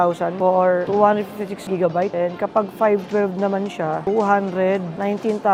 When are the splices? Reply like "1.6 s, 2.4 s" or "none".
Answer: none